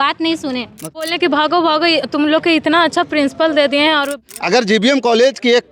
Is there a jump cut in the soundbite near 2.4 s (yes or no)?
no